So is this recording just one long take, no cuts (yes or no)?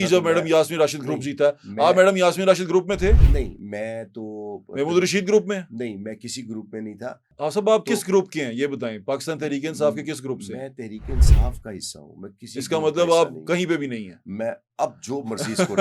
no